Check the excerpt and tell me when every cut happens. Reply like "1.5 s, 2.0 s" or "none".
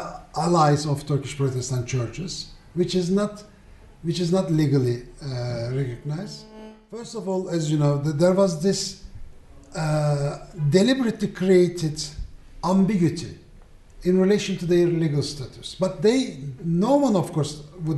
8.4 s